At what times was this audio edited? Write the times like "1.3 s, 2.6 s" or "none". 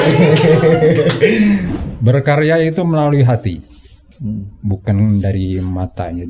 1.7 s